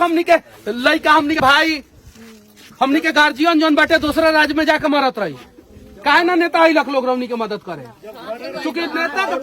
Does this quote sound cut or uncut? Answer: cut